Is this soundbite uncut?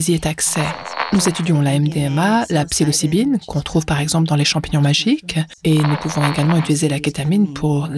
no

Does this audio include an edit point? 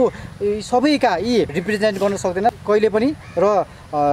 yes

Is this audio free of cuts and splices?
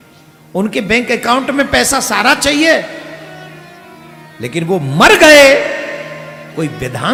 yes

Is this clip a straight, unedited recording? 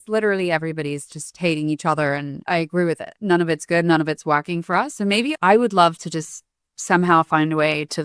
yes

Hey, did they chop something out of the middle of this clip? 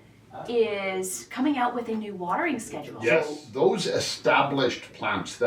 yes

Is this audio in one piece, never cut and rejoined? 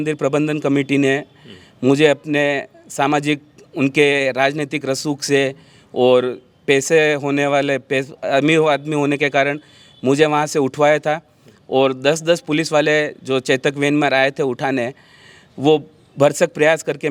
yes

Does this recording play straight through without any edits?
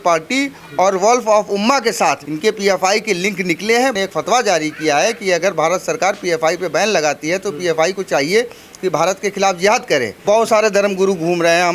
no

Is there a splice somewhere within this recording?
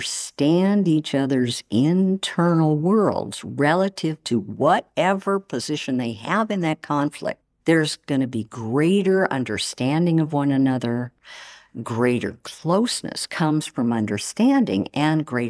no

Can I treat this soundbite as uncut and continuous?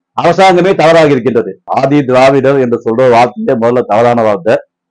no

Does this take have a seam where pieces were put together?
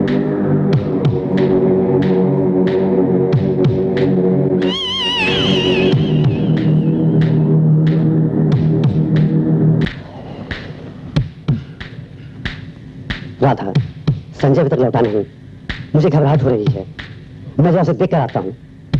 yes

